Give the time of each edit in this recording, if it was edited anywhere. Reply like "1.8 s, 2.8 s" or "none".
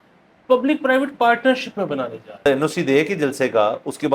2.5 s